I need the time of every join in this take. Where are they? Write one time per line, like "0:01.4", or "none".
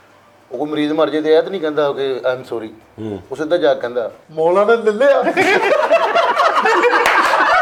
none